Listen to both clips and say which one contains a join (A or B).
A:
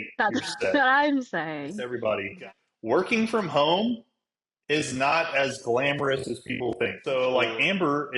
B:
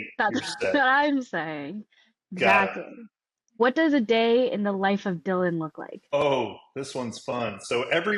A